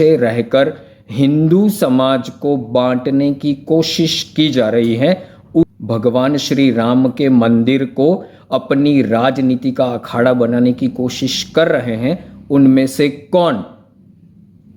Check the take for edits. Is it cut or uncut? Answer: cut